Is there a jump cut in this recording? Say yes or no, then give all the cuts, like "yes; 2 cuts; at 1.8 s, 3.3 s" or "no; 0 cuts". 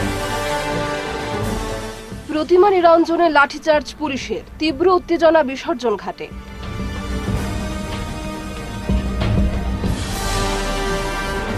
no; 0 cuts